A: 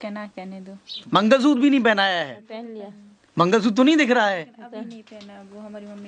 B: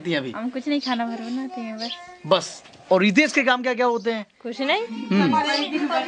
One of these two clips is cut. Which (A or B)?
A